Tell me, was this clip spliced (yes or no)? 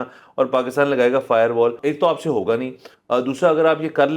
yes